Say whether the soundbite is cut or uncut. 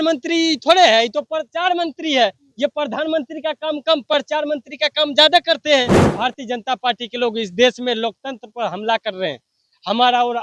cut